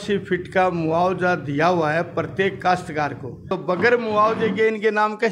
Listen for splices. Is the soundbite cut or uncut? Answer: cut